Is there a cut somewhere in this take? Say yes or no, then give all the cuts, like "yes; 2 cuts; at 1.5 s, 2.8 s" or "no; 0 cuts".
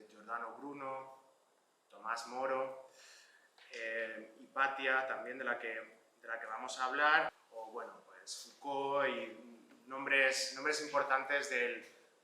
yes; 1 cut; at 7.4 s